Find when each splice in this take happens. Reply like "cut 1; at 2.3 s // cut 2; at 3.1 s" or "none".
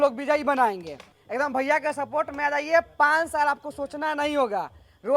cut 1; at 1.1 s